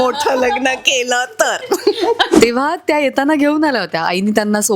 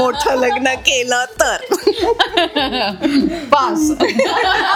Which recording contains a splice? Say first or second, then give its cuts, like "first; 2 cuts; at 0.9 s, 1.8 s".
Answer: first; 1 cut; at 2.3 s